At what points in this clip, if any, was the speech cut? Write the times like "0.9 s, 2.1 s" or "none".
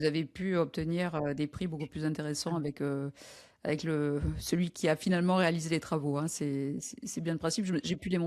4.7 s